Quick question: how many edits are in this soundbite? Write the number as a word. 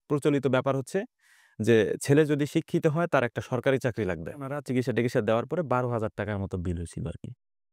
one